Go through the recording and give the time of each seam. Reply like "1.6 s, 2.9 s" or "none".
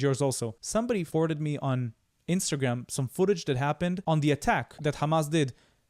0.9 s, 4.0 s, 4.8 s